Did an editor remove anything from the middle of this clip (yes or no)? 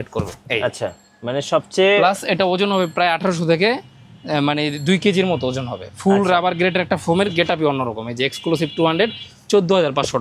no